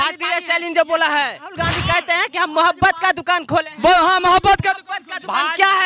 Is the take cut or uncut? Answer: cut